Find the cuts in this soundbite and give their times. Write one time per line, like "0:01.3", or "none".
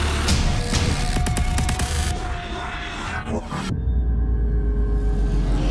none